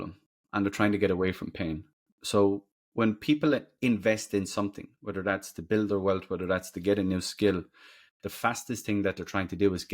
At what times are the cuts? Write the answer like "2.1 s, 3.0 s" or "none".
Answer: none